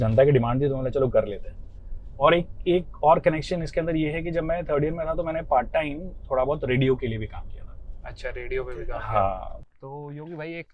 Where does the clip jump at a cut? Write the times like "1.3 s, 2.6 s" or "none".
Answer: 9.5 s